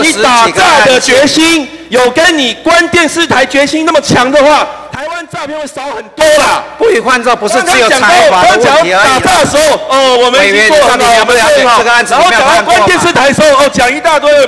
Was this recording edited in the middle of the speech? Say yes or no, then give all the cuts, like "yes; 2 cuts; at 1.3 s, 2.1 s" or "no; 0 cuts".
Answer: no; 0 cuts